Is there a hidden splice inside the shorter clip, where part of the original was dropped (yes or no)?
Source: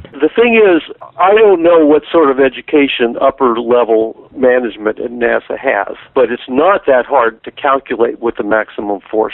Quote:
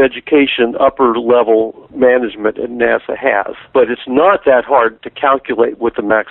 no